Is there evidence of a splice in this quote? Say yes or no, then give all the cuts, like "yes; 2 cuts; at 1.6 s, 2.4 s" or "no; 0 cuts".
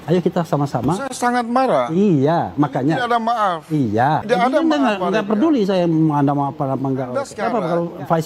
yes; 2 cuts; at 4.2 s, 7.3 s